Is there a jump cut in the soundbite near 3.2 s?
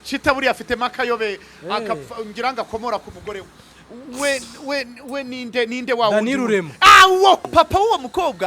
no; 1 cut; at 7.5 s

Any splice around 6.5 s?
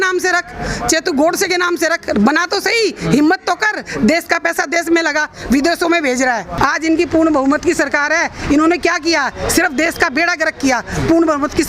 yes; 1 cut; at 6.5 s

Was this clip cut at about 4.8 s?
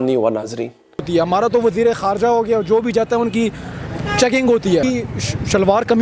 yes; 2 cuts; at 1.1 s, 4.8 s

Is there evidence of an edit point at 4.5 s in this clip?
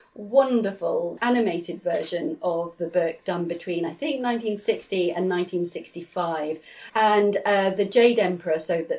no; 2 cuts; at 1.2 s, 6.7 s

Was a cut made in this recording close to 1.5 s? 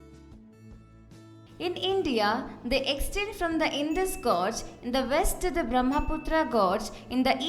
yes; 1 cut; at 1.5 s

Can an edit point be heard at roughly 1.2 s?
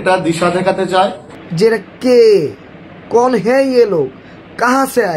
no; 0 cuts

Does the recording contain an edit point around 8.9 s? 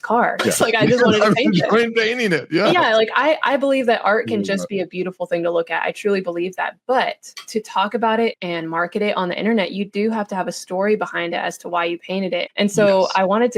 no; 1 cut; at 12.4 s

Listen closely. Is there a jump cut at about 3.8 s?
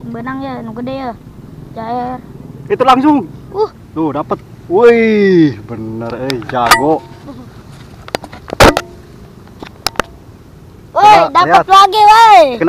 yes; 1 cut; at 3.8 s

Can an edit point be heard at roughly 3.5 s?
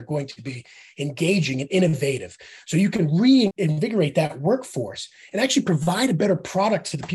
yes; 1 cut; at 3.5 s

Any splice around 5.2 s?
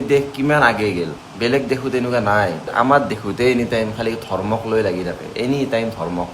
no; 1 cut; at 1.2 s

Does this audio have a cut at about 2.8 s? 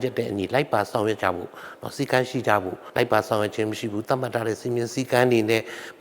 yes; 1 cut; at 2.8 s

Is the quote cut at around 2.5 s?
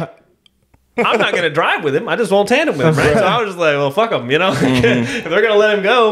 no; 1 cut; at 0.9 s

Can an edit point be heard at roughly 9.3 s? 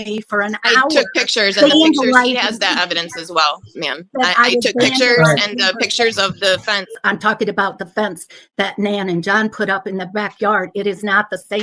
no; 1 cut; at 6.9 s

